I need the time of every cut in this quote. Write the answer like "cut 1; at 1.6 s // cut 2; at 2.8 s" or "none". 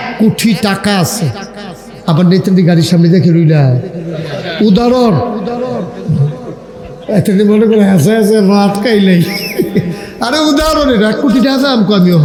none